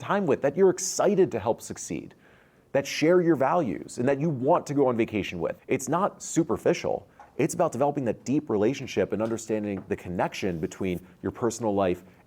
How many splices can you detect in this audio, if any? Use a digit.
1